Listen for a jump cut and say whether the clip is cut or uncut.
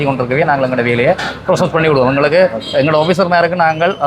uncut